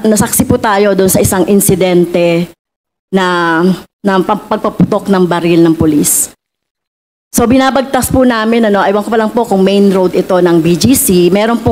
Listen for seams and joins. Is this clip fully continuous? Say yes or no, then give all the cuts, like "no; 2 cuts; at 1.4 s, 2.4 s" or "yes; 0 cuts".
yes; 0 cuts